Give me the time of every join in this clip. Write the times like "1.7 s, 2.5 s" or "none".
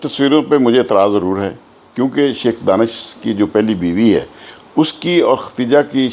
none